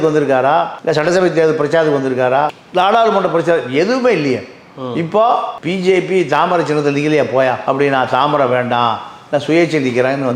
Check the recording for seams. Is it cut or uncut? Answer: uncut